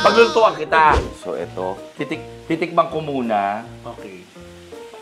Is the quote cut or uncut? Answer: cut